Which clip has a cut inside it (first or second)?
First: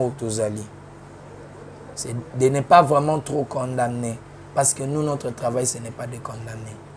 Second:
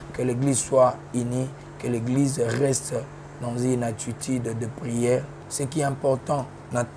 second